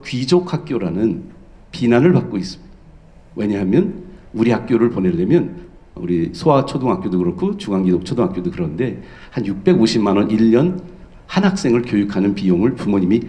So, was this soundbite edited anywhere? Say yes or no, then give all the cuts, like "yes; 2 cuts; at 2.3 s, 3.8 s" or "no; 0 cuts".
no; 0 cuts